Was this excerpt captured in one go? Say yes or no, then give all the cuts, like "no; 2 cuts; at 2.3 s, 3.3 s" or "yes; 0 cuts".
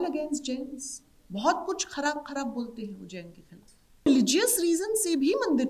no; 1 cut; at 4.1 s